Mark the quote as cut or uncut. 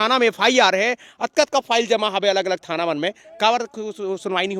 uncut